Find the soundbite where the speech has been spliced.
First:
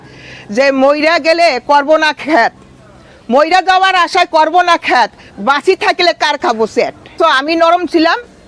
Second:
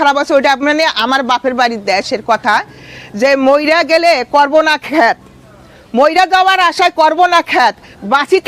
first; 1 cut; at 7.2 s

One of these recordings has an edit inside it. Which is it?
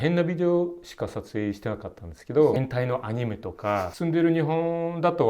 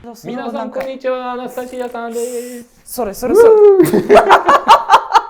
first; 2 cuts; at 2.6 s, 3.9 s

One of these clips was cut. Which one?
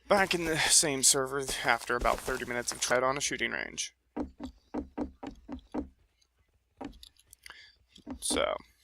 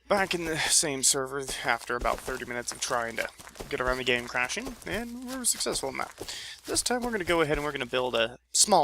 second; 1 cut; at 2.9 s

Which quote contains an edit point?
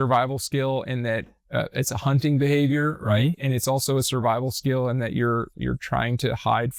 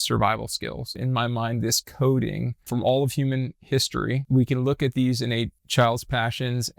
second; 4 cuts; at 1.0 s, 2.6 s, 4.2 s, 5.6 s

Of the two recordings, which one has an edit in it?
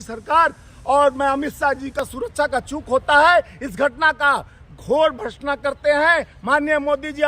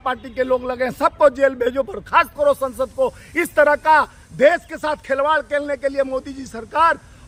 first; 1 cut; at 1.9 s

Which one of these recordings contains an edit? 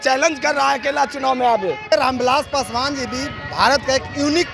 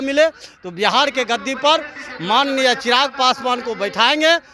first; 1 cut; at 1.9 s

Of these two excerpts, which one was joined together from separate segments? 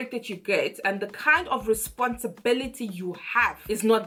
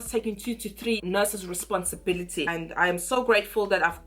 second; 1 cut; at 2.5 s

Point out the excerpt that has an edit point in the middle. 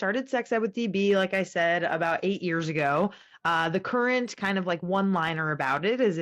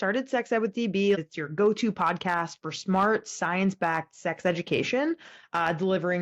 second; 1 cut; at 1.2 s

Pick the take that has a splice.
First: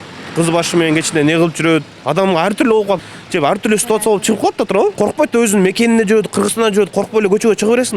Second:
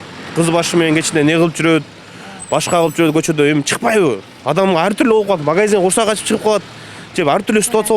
first; 3 cuts; at 2.0 s, 3.0 s, 4.9 s

